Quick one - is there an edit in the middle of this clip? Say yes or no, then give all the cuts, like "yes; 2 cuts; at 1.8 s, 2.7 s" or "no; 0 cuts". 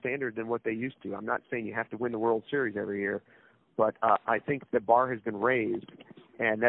no; 0 cuts